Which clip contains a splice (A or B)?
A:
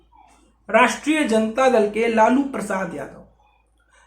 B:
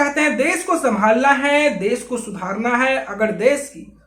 A